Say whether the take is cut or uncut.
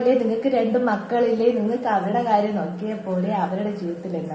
uncut